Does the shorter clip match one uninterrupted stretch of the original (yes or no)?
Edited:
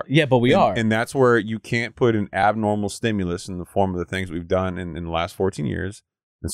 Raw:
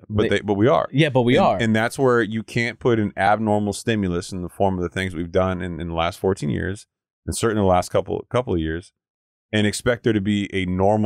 yes